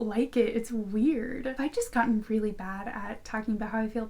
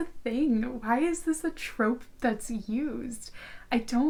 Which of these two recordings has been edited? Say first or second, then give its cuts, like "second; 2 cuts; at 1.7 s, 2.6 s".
first; 1 cut; at 1.5 s